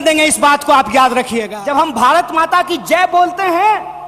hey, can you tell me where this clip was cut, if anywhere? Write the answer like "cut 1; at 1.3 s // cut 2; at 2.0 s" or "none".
cut 1; at 1.5 s

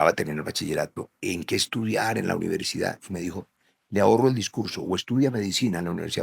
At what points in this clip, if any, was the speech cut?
cut 1; at 1.1 s

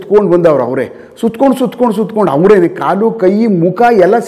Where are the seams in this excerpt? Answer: none

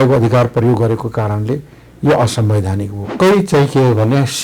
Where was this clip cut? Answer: cut 1; at 3.0 s

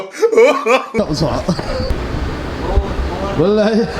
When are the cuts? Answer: cut 1; at 1.9 s

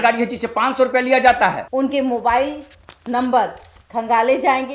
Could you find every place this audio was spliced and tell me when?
cut 1; at 1.6 s

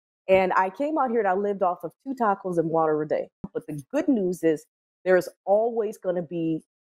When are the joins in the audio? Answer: cut 1; at 3.5 s

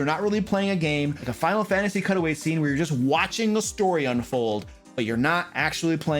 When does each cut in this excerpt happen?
cut 1; at 1.2 s

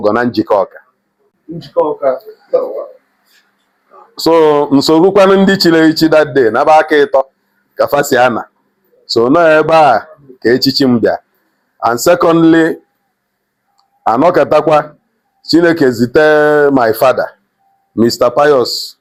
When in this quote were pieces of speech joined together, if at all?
none

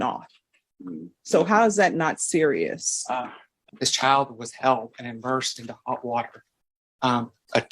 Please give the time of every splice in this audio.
cut 1; at 3.6 s

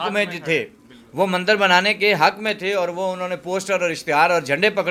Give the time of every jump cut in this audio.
none

